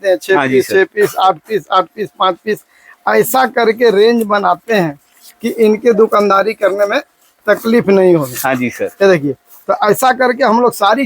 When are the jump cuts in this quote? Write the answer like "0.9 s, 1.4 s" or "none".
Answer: none